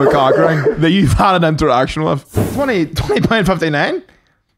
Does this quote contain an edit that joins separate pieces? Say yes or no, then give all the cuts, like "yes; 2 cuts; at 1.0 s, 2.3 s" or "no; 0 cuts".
yes; 1 cut; at 2.4 s